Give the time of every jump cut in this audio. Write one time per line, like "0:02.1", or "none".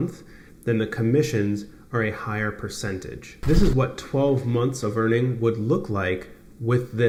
none